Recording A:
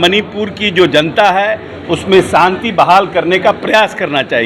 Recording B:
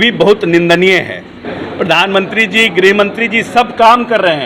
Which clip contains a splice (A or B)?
B